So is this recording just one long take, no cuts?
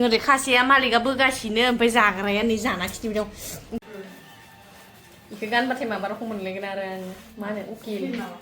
no; 1 cut; at 3.8 s

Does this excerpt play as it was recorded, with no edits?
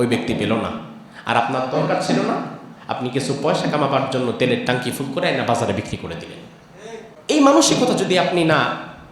no; 1 cut; at 7.1 s

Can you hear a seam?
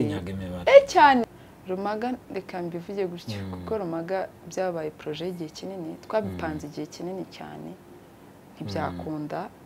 yes; 1 cut; at 1.3 s

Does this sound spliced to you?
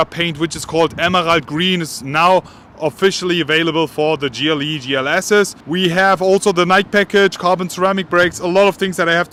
no; 0 cuts

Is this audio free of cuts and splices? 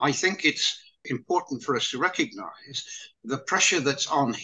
no; 1 cut; at 1.1 s

